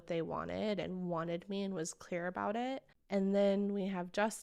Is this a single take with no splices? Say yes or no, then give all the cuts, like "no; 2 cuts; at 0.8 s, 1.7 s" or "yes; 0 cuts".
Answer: no; 1 cut; at 2.9 s